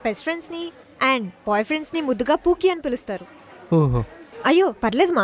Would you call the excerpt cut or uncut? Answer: cut